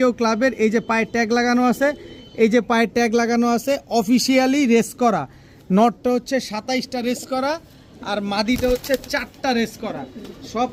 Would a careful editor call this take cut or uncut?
uncut